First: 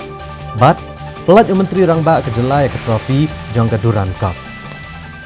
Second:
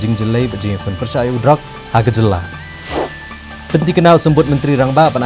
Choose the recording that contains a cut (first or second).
first